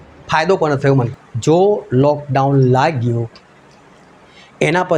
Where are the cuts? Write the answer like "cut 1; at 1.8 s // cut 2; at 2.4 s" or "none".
cut 1; at 1.2 s